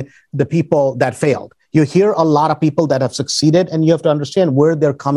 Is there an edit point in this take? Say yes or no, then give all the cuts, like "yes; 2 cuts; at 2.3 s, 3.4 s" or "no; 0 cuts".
no; 0 cuts